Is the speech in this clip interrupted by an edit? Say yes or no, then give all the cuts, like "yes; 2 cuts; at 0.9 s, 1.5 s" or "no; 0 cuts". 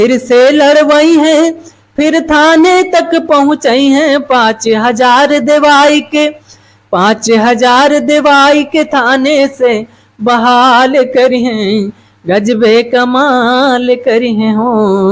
no; 0 cuts